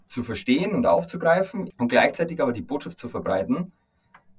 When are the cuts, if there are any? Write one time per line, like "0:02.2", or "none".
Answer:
0:01.6